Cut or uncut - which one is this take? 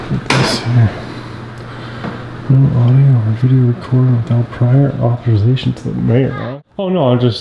cut